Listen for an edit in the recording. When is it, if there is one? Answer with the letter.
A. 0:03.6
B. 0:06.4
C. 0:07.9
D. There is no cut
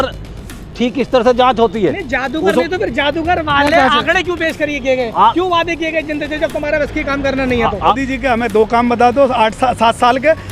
C